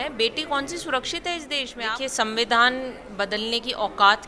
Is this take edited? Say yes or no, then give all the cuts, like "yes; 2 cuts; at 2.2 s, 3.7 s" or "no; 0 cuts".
yes; 1 cut; at 1.7 s